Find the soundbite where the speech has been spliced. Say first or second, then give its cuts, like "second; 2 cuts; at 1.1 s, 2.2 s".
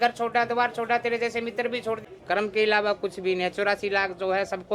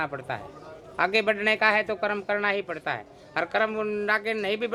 first; 1 cut; at 2.0 s